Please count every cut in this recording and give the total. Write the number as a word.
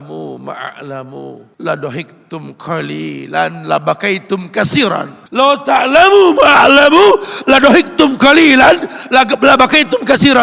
two